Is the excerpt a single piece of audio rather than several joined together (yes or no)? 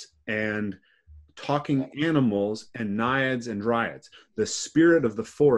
yes